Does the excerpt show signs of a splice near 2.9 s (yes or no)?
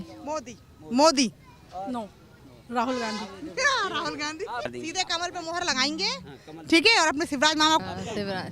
no